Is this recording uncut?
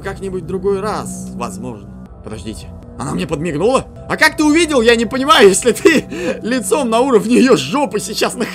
no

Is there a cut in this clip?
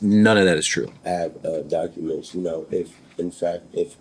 yes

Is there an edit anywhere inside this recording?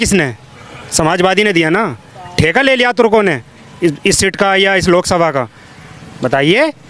no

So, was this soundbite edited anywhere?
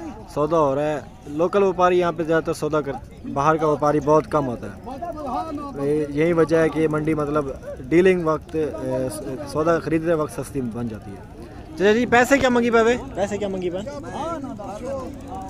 no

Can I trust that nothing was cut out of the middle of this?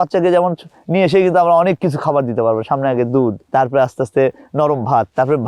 no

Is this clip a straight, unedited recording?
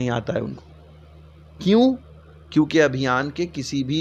yes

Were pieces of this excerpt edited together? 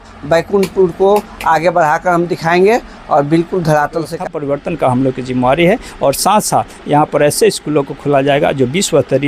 yes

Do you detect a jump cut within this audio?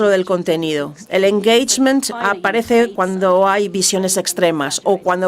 no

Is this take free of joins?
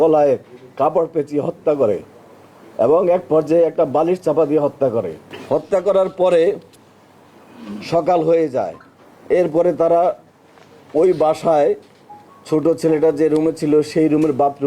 yes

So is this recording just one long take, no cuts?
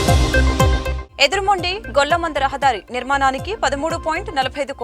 no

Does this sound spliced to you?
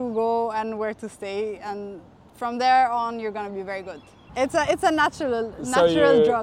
yes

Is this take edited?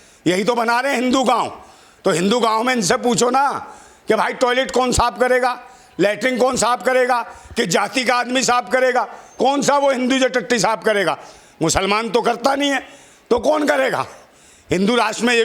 no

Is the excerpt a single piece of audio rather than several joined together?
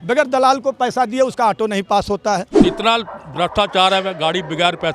no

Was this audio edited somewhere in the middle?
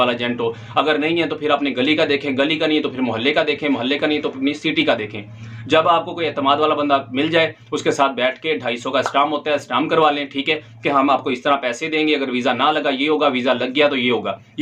no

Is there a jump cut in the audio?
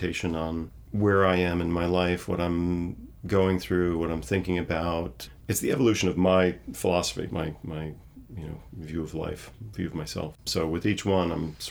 yes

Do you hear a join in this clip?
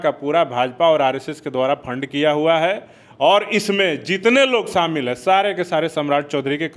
no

